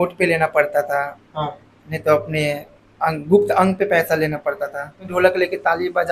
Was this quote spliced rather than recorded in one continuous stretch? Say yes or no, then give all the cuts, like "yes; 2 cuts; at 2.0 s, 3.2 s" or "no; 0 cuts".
yes; 1 cut; at 5.1 s